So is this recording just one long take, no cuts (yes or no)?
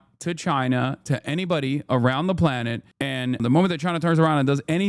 no